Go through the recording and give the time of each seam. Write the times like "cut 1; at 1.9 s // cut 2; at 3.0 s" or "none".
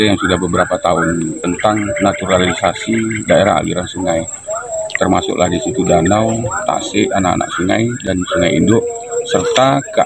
cut 1; at 1.4 s